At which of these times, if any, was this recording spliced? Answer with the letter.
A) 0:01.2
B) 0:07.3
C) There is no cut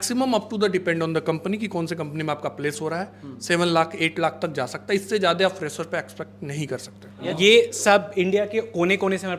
B